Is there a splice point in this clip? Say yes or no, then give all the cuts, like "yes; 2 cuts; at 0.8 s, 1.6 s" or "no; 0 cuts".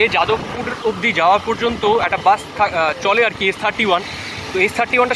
no; 0 cuts